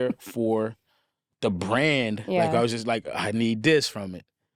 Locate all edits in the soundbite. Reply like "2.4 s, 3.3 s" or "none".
none